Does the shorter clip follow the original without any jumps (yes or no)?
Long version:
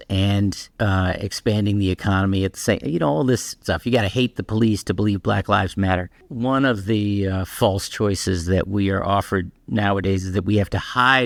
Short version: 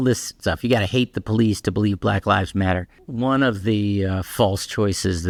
yes